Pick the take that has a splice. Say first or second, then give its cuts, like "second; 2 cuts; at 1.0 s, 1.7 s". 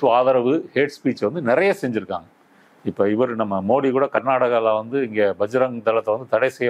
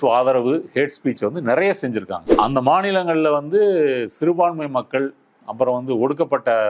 second; 1 cut; at 2.3 s